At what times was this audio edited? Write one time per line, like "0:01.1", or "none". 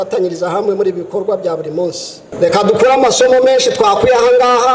0:02.2